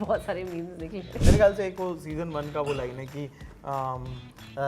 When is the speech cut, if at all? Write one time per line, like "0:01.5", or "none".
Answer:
0:01.2

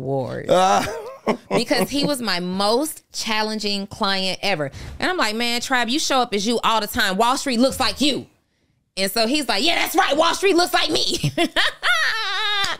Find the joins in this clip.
0:04.8

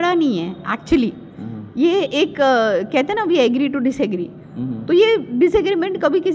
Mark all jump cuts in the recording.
none

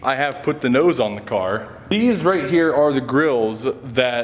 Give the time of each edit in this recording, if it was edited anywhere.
0:01.9

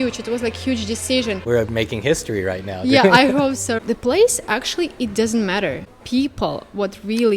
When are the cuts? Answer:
0:01.5
0:03.7
0:05.9

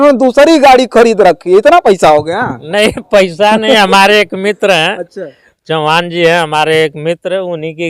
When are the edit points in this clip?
none

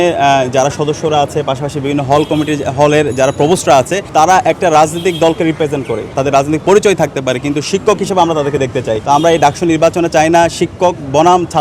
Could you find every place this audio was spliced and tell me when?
0:06.1
0:09.0

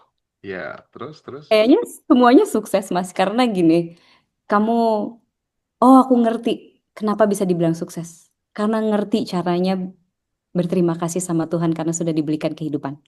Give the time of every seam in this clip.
none

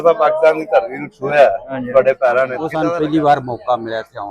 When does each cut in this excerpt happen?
0:02.6

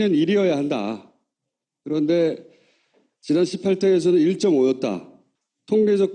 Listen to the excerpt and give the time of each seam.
0:04.0

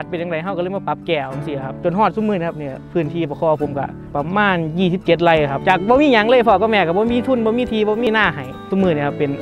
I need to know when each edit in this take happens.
0:01.7
0:04.1
0:05.6
0:08.7

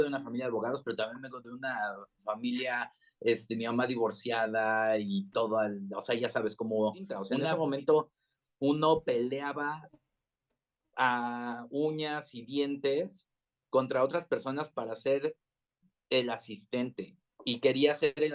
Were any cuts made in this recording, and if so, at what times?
0:07.3

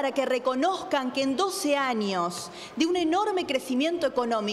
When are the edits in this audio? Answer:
none

